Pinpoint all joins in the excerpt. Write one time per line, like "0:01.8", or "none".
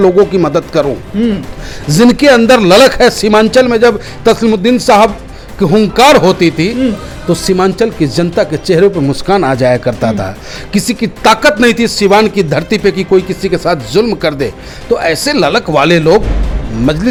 none